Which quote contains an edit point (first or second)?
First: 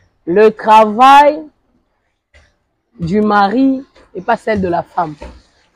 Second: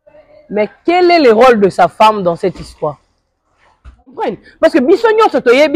second